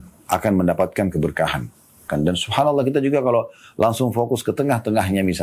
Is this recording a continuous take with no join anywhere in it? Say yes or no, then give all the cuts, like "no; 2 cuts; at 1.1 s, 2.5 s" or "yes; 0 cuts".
no; 1 cut; at 2.1 s